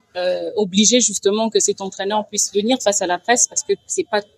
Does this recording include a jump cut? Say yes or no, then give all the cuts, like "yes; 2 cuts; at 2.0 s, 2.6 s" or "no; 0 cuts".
no; 0 cuts